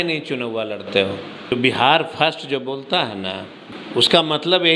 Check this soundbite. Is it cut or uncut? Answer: cut